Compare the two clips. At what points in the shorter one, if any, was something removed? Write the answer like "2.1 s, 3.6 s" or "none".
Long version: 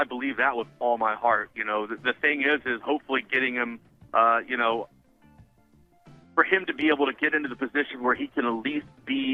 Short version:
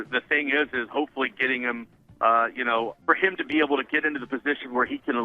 3.0 s